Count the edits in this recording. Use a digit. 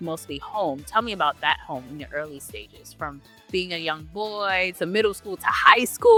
0